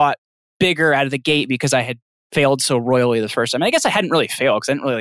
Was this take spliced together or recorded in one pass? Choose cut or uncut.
cut